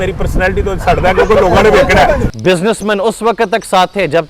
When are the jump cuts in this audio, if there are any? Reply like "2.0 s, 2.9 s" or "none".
2.3 s